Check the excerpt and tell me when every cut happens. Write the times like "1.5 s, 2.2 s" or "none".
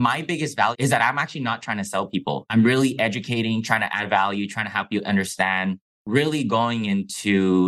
0.8 s, 2.5 s, 6.0 s

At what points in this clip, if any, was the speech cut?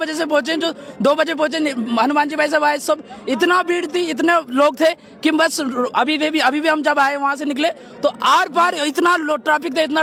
none

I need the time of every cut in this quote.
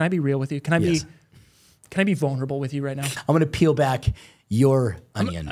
3.0 s

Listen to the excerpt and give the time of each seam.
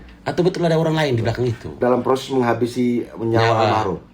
1.8 s

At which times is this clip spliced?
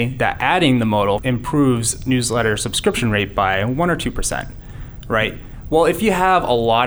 1.2 s

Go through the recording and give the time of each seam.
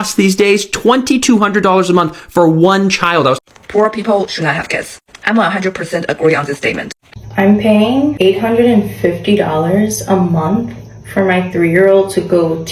3.4 s, 7.0 s

